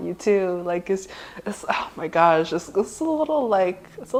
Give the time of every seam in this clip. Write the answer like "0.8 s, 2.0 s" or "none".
none